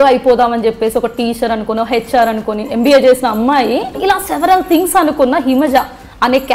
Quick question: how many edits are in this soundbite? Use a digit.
1